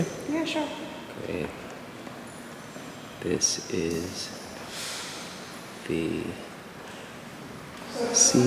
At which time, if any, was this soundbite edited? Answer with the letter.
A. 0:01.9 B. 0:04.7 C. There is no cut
C